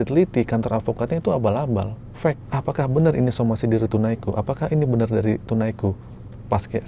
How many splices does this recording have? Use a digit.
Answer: 1